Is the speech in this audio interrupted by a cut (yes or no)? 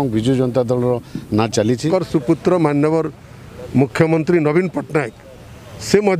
yes